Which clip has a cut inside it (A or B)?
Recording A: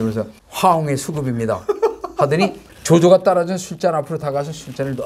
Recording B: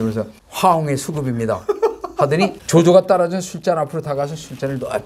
B